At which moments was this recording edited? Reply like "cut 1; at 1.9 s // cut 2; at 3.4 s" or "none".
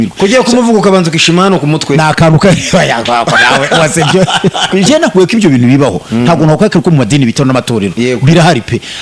cut 1; at 4.9 s

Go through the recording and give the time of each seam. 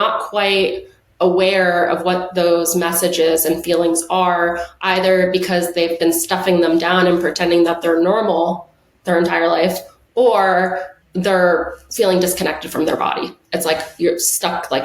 cut 1; at 10.9 s

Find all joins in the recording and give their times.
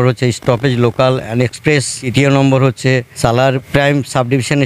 cut 1; at 2.0 s // cut 2; at 3.6 s

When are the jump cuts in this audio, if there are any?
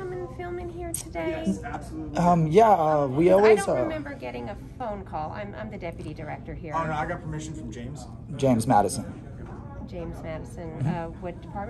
none

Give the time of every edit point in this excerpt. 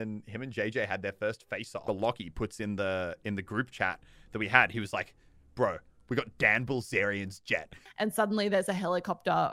cut 1; at 1.9 s // cut 2; at 7.8 s

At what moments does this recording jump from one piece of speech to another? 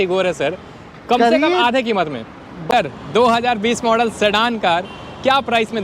cut 1; at 2.6 s

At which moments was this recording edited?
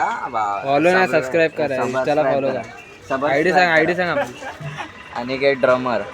none

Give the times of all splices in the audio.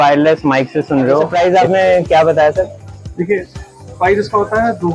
cut 1; at 1.3 s

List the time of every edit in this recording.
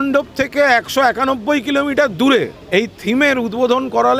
cut 1; at 2.6 s

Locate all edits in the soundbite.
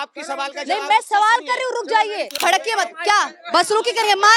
cut 1; at 2.4 s

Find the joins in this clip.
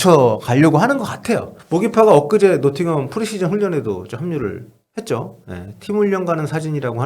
cut 1; at 1.5 s

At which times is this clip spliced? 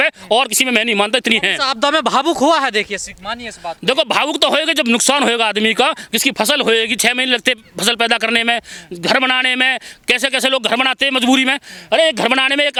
none

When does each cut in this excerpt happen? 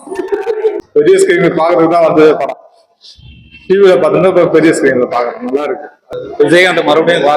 cut 1; at 0.8 s // cut 2; at 6.0 s

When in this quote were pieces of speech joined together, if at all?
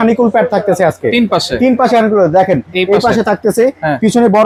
none

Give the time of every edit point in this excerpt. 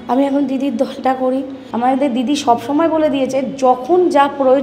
cut 1; at 1.6 s

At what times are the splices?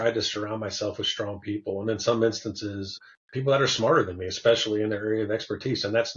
cut 1; at 3.0 s

